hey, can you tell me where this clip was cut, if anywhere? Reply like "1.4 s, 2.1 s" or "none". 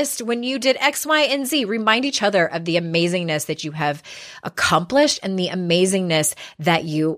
none